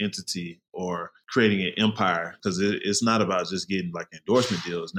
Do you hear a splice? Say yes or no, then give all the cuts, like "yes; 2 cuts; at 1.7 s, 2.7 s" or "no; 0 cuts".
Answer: yes; 2 cuts; at 1.2 s, 2.4 s